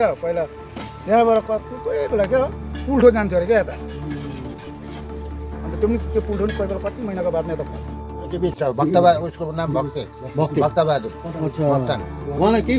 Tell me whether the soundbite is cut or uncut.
cut